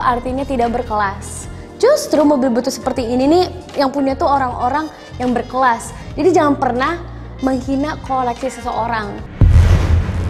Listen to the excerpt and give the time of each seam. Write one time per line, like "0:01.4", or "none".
0:03.7
0:06.0
0:09.2